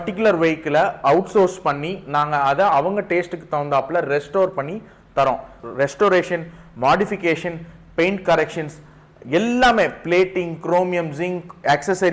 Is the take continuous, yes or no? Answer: no